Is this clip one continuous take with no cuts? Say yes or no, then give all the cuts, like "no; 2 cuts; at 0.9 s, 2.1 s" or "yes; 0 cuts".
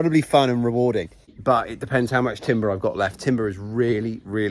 no; 1 cut; at 1.3 s